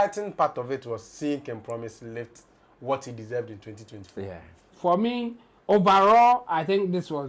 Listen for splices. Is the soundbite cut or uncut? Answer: cut